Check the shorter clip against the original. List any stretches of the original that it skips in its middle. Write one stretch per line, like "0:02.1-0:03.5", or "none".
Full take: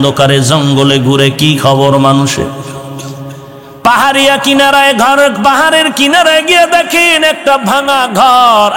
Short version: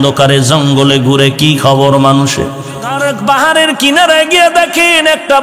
0:03.0-0:05.1